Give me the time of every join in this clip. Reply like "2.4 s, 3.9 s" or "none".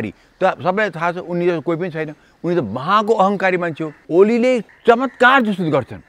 3.9 s, 4.7 s